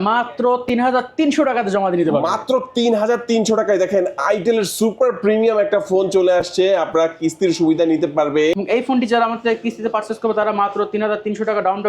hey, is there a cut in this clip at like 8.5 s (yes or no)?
yes